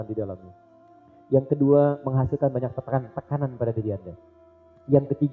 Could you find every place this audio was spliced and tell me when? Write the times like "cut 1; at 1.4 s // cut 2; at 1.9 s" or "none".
none

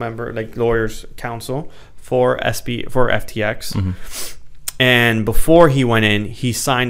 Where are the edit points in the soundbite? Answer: none

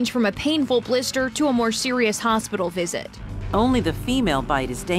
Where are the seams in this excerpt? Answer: cut 1; at 3.2 s

